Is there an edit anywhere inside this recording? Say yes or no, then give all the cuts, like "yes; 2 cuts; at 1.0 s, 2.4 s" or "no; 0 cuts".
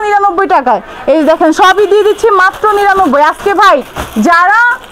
no; 0 cuts